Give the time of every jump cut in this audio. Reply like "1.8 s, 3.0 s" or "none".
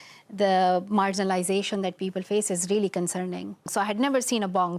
3.7 s